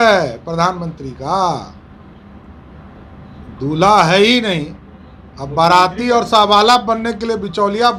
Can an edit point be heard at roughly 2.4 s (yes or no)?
no